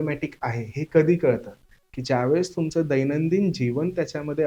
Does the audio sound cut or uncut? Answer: uncut